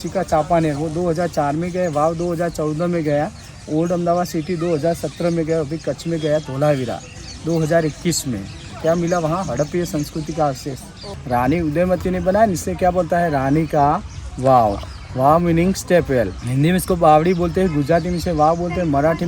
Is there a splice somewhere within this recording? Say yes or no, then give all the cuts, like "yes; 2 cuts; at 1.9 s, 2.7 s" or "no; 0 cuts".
yes; 2 cuts; at 11.0 s, 16.4 s